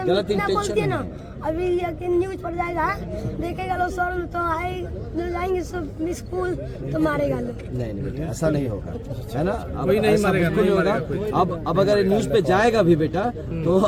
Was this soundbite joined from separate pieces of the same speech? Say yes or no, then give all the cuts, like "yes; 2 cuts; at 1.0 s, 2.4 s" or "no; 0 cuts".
no; 0 cuts